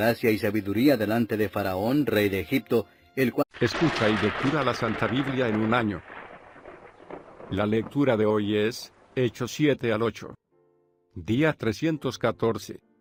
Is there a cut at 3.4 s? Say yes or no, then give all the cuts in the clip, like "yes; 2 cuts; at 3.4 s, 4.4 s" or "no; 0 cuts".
no; 0 cuts